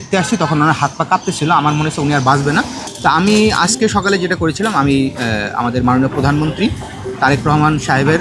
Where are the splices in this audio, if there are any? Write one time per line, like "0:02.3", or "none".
0:02.8